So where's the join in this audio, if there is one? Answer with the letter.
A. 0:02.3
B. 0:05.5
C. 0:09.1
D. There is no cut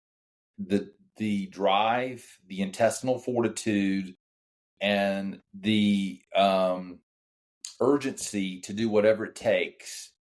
B